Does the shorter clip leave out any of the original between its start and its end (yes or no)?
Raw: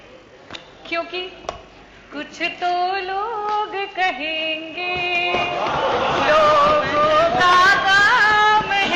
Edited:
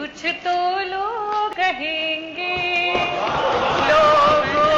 yes